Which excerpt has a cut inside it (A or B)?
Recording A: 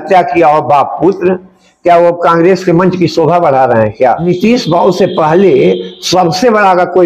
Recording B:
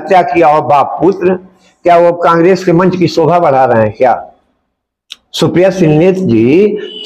A